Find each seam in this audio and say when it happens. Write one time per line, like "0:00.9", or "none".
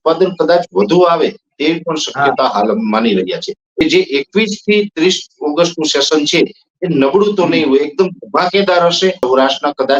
0:03.6
0:09.2